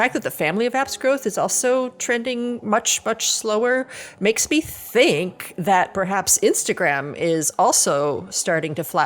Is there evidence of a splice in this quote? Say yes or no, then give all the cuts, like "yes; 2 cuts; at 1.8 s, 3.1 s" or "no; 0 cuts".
no; 0 cuts